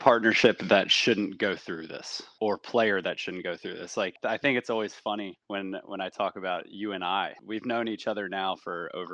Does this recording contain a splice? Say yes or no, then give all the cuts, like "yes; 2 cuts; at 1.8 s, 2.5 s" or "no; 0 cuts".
yes; 1 cut; at 2.2 s